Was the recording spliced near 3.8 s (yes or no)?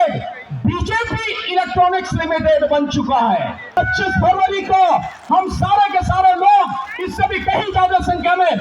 yes